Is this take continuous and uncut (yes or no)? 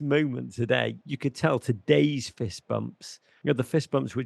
no